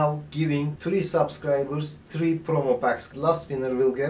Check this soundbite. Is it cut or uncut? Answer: uncut